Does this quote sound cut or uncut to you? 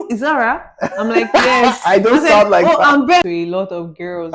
cut